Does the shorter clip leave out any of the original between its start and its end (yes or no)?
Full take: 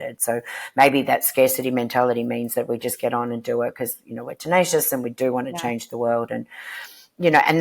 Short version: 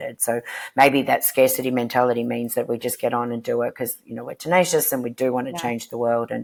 no